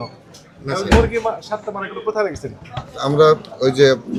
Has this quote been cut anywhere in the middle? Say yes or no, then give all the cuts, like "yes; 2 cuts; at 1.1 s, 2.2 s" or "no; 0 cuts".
no; 0 cuts